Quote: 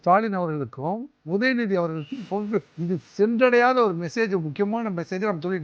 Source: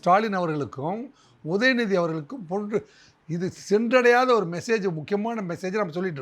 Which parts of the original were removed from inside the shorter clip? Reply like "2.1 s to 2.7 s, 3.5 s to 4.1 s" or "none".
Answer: 1.1 s to 1.3 s, 2.9 s to 3.3 s

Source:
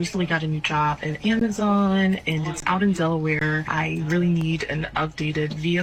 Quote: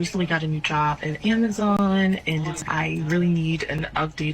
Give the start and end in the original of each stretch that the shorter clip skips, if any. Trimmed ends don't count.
2.6 s to 3.6 s

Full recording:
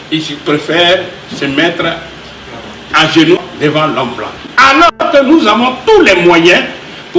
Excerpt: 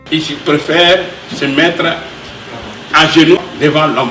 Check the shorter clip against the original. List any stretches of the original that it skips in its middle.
none

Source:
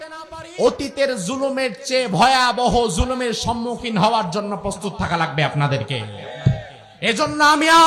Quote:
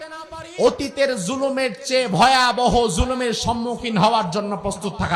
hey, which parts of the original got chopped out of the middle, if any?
none

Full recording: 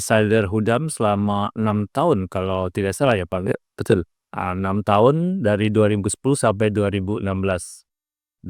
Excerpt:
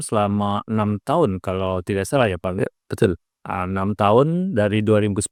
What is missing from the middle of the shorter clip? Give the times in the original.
none

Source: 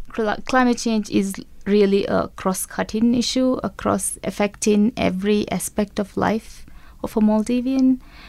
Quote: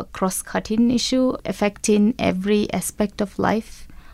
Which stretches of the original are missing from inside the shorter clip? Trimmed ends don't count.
3.7 s to 4.2 s

